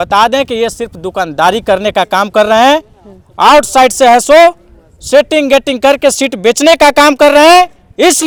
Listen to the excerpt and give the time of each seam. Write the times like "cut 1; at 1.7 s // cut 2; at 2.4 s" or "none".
none